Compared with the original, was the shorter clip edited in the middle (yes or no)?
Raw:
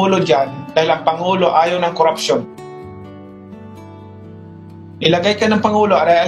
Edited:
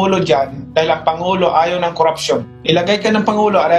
yes